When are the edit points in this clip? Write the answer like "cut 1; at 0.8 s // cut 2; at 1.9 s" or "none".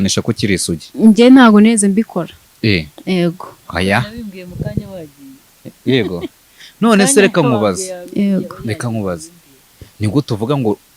none